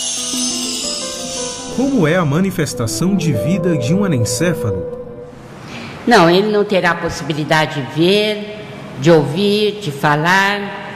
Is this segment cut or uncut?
cut